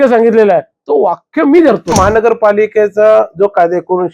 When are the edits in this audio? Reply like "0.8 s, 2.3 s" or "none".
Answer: 1.9 s